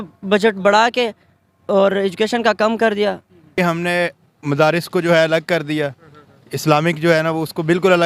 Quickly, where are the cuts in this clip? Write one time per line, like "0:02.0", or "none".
0:03.5